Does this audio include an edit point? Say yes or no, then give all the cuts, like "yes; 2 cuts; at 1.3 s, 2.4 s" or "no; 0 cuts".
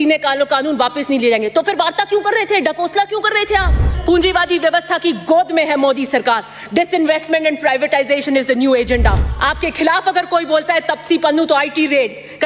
yes; 2 cuts; at 4.0 s, 9.3 s